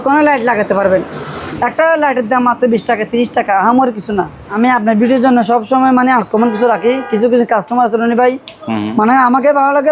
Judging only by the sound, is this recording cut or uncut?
cut